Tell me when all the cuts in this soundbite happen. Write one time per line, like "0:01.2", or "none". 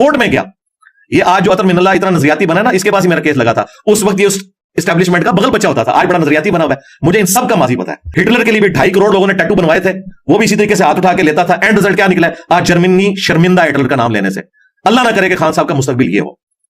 0:08.0